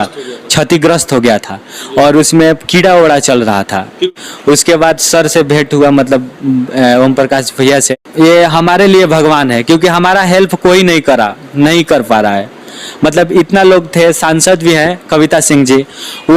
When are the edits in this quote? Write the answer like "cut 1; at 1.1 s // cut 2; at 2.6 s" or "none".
cut 1; at 4.1 s // cut 2; at 8.0 s